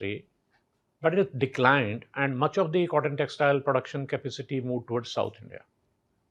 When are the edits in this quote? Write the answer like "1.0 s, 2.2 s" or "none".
none